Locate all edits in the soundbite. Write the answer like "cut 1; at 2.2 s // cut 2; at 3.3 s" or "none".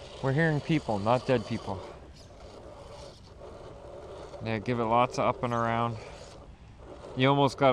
cut 1; at 2.2 s